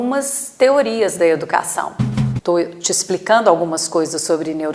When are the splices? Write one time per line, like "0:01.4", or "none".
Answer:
0:02.1